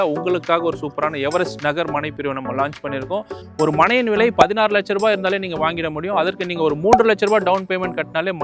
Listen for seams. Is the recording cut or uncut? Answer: cut